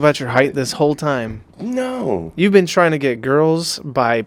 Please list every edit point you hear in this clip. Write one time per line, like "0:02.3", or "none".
none

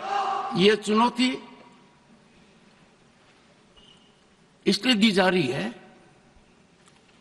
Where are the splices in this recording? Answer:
none

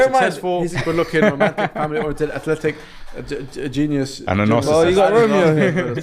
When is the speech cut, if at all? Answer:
none

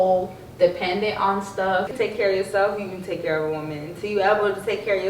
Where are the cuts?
0:01.9

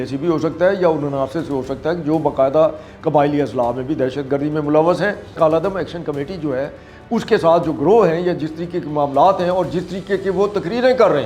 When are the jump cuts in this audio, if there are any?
0:05.3

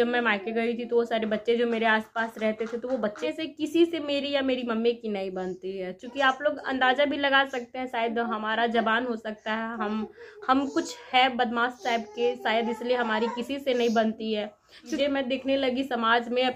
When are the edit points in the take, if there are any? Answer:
0:03.3
0:14.9

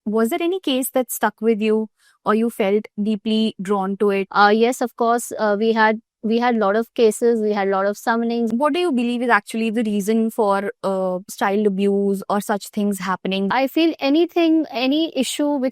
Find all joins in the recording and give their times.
0:04.3
0:08.5
0:13.5

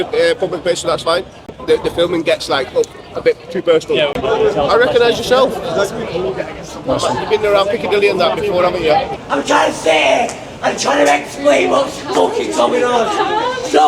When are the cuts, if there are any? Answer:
0:01.4
0:04.1
0:09.1

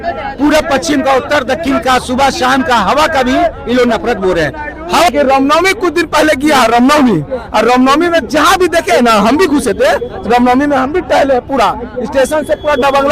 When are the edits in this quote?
0:05.1

